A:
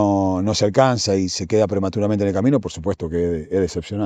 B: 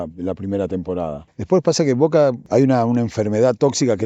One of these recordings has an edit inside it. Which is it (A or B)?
B